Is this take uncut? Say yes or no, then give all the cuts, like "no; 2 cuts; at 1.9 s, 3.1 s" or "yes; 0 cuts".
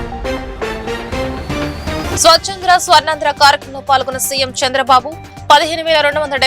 no; 1 cut; at 2.1 s